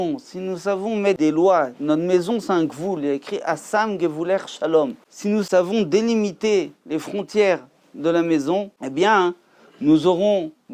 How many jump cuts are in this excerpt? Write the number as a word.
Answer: two